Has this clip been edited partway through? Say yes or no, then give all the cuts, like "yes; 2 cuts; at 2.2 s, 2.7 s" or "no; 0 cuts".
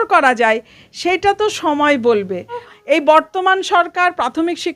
yes; 1 cut; at 2.7 s